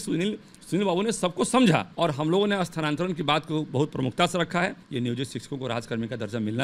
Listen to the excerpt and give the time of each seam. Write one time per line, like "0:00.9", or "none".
0:01.9
0:04.8